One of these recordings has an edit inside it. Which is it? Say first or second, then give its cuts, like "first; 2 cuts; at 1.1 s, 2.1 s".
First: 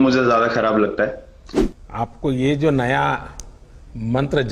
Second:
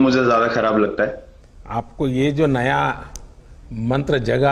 second; 1 cut; at 1.5 s